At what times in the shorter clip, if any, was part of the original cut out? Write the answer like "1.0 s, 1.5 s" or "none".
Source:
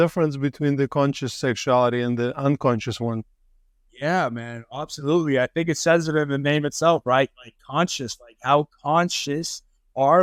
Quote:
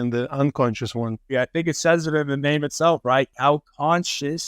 1.3 s, 3.3 s